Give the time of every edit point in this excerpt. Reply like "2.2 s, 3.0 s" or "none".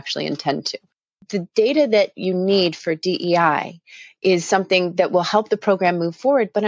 1.1 s